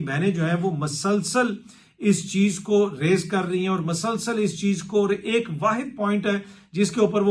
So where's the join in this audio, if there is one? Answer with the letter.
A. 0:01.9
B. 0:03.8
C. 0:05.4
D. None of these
D